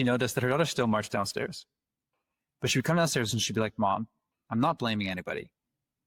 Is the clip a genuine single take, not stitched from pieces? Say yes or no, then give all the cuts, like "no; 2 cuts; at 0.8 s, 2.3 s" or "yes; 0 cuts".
yes; 0 cuts